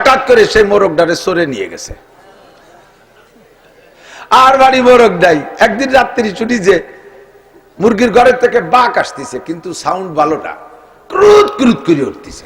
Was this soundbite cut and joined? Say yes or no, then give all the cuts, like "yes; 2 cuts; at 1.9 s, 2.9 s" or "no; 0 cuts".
no; 0 cuts